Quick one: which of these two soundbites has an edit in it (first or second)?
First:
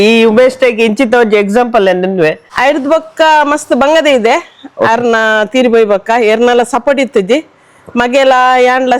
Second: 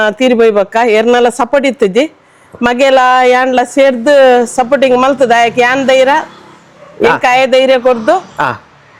first